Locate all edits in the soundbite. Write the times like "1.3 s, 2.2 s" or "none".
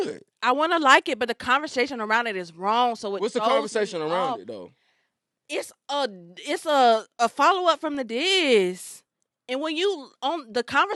none